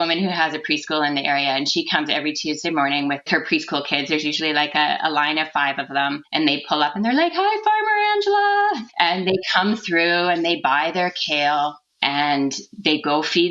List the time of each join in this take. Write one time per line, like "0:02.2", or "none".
0:03.3
0:08.9